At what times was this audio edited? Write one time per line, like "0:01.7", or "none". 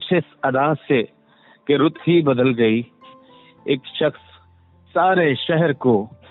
none